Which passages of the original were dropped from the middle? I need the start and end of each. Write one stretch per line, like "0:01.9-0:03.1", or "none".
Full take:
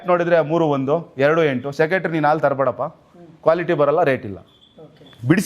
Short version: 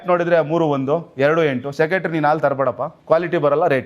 0:02.9-0:03.3

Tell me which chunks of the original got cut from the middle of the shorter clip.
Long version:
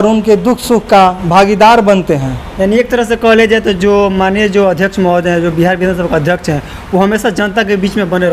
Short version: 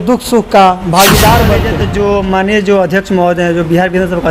0:02.1-0:03.6

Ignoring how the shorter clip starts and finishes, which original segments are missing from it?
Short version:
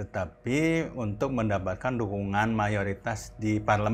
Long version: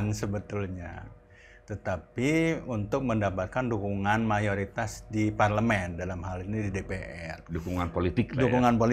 none

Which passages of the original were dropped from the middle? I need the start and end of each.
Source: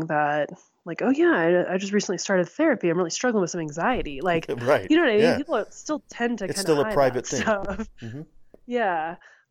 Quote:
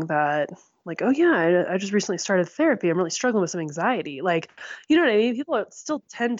none

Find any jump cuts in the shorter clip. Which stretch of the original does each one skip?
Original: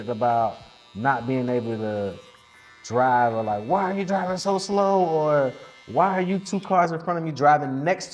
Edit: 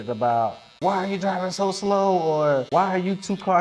0:00.8-0:03.6
0:05.5-0:05.9

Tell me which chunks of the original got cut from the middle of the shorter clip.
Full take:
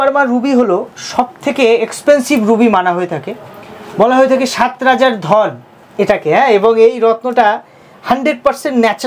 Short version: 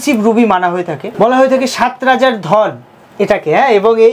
0:03.2-0:03.8

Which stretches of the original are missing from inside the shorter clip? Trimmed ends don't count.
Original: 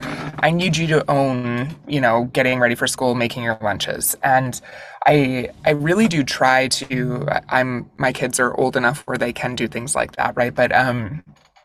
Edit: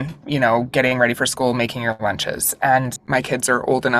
0:04.6-0:07.9

